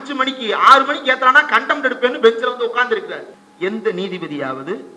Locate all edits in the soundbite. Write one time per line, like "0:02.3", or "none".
none

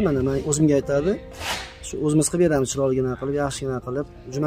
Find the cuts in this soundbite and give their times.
none

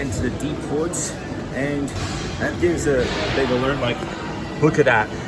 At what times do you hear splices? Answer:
none

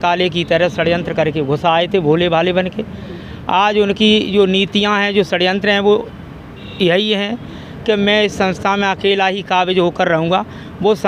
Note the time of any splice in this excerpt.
none

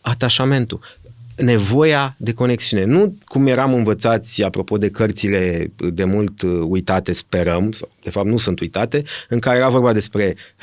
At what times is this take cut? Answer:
none

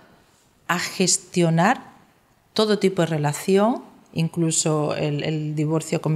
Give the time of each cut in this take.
none

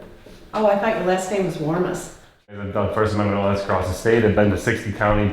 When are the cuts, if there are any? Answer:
0:02.4

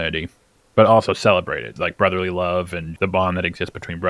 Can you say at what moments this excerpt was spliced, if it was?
0:01.6
0:02.8

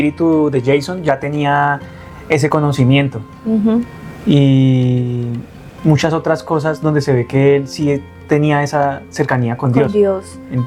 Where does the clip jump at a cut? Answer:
none

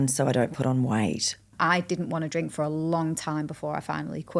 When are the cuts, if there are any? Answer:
0:01.4

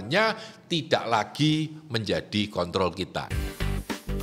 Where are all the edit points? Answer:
0:03.3

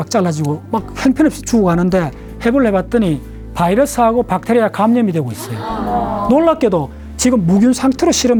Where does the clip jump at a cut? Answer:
none

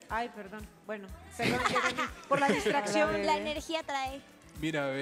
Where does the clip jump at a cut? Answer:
none

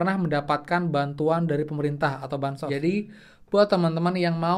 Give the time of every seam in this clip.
0:02.6

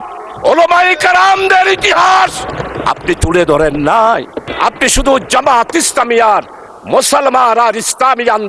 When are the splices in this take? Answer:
0:04.4

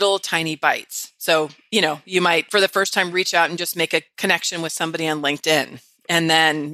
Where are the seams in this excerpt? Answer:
none

